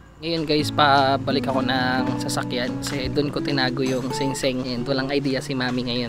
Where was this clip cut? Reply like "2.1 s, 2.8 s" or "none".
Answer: none